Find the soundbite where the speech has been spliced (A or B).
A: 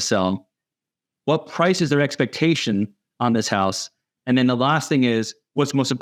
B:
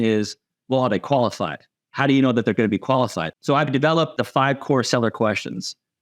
B